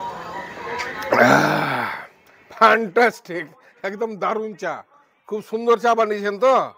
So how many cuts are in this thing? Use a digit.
0